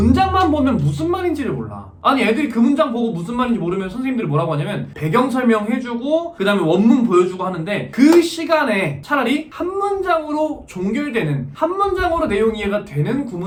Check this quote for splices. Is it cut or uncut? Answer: uncut